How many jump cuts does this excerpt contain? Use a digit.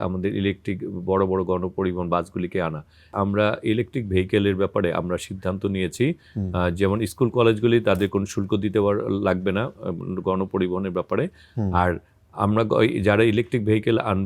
1